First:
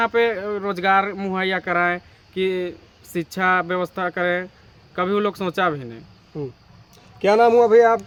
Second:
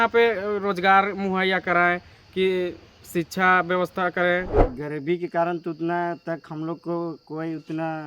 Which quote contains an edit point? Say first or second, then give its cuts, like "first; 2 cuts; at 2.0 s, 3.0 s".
second; 1 cut; at 4.6 s